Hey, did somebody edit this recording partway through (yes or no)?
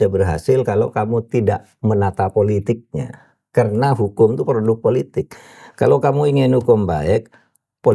no